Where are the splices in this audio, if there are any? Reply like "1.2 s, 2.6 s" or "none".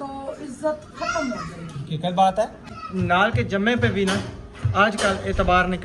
2.8 s